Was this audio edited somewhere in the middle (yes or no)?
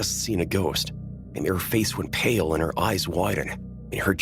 no